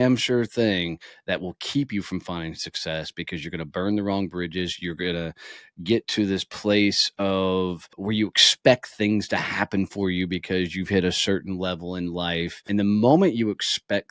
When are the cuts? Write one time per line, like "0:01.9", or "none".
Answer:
0:07.9
0:12.5